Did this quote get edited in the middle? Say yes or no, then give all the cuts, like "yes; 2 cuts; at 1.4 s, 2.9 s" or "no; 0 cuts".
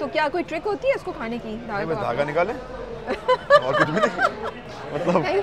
no; 0 cuts